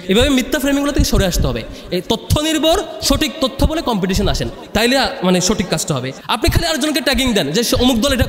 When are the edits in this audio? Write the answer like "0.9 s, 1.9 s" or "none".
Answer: 6.2 s

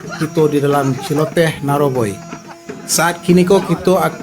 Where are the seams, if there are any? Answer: 3.2 s

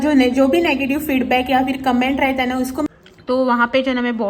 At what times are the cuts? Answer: 2.9 s

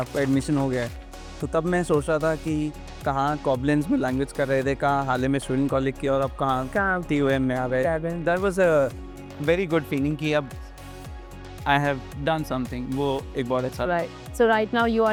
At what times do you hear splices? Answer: none

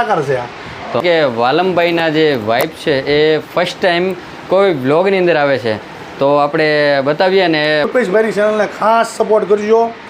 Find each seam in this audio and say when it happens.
1.0 s, 7.9 s

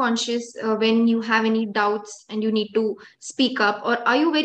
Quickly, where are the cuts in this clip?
none

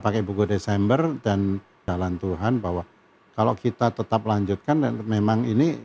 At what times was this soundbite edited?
1.8 s

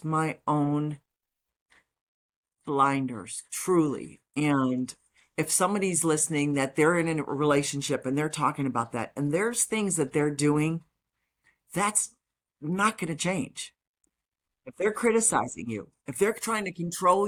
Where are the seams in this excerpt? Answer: none

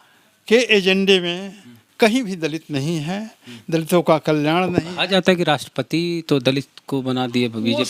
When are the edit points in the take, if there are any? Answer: none

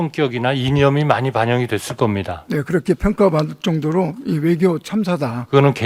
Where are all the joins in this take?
none

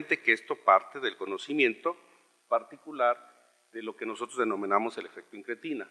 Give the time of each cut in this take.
4.9 s

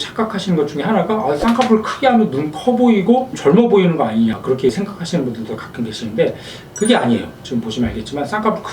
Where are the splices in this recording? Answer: none

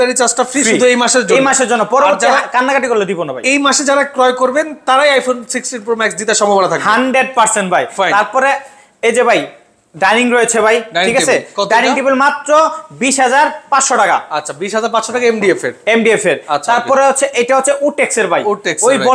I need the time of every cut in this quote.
none

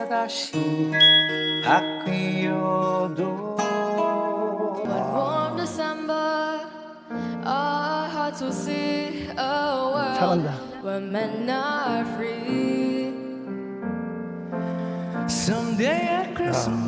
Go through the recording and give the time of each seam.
4.8 s

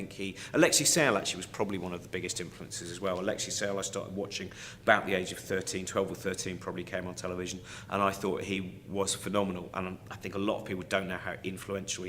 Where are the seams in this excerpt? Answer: 7.3 s

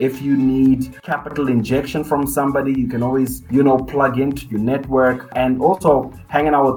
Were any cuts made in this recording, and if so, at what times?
1.2 s, 3.4 s, 5.3 s

